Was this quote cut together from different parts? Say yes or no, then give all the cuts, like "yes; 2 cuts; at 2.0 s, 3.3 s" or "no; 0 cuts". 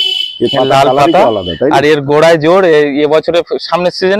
no; 0 cuts